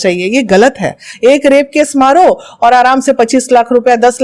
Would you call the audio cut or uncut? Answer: cut